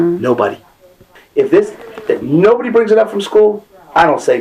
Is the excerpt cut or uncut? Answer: cut